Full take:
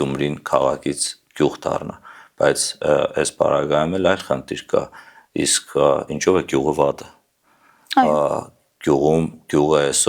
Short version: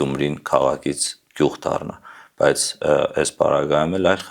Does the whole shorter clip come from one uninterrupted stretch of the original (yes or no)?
yes